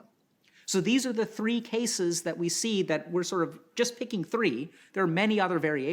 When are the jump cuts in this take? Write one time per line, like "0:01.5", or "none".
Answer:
none